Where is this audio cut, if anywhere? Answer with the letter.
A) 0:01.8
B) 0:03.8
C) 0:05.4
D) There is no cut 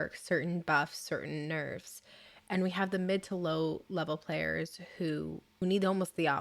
C